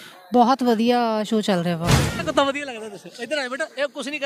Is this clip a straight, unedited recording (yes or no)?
no